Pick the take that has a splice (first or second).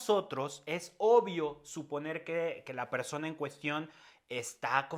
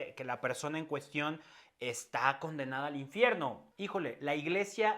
second